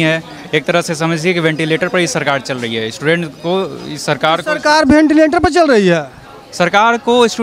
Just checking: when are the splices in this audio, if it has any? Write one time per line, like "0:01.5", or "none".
none